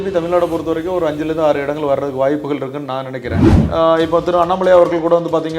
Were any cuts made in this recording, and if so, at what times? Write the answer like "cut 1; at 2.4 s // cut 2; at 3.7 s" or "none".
cut 1; at 3.5 s